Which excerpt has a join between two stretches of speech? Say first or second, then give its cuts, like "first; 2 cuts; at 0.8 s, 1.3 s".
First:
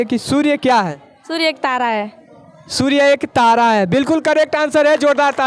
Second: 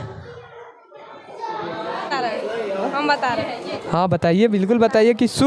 second; 1 cut; at 2.1 s